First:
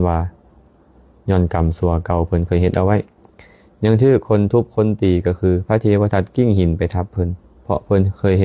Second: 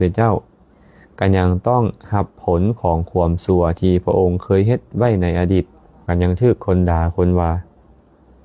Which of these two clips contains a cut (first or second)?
second